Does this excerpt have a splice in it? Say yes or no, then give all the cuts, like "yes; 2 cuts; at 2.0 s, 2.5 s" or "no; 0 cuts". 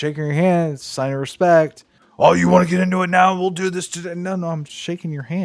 no; 0 cuts